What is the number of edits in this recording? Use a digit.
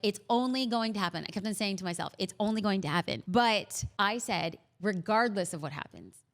1